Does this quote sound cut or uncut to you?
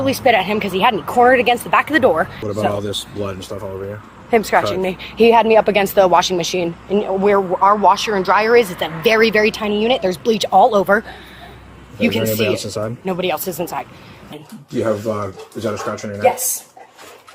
cut